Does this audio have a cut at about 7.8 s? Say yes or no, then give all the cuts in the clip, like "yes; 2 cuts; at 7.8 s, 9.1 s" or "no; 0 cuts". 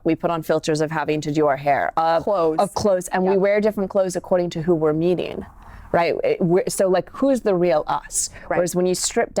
no; 0 cuts